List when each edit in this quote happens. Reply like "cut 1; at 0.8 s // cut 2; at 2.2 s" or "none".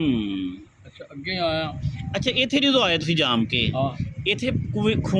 cut 1; at 1.7 s